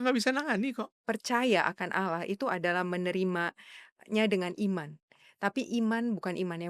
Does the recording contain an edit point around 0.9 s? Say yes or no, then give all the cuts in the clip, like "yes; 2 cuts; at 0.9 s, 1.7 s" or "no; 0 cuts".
yes; 1 cut; at 0.9 s